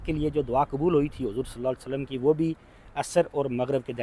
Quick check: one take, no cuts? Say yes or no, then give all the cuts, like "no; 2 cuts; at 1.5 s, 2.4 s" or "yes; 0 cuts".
yes; 0 cuts